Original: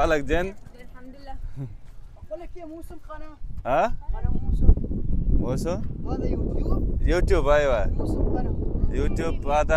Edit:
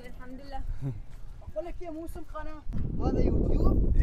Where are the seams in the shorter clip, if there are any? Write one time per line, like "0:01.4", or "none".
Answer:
0:02.8